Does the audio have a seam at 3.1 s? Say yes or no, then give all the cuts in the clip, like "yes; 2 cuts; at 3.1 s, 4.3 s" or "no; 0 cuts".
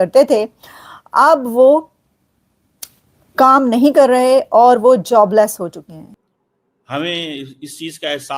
no; 1 cut; at 6.3 s